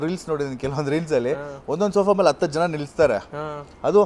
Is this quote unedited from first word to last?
yes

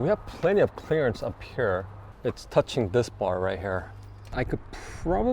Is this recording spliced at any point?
yes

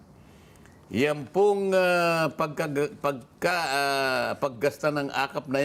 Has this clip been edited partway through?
no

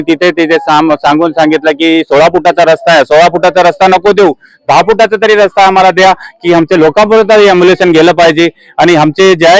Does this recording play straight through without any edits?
yes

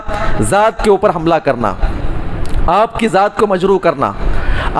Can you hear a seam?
no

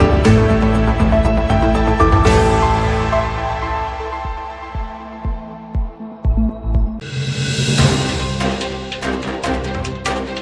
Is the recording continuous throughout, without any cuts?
no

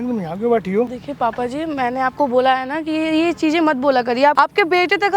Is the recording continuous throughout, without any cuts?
no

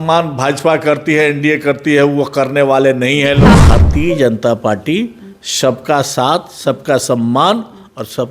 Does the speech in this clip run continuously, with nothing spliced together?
no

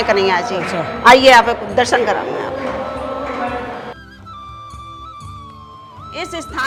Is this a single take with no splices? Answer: yes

